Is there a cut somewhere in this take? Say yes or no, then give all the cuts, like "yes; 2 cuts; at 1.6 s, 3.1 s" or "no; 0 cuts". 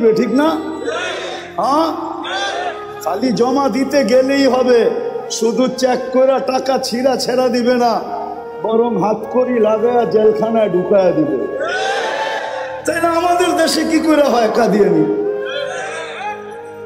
no; 0 cuts